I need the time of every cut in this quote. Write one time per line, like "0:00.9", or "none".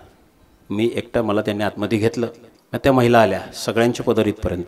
0:02.5